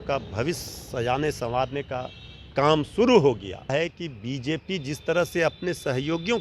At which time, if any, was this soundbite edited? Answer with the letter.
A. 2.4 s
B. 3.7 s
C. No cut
B